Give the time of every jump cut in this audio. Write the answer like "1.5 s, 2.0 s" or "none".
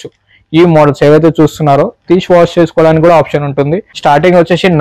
3.9 s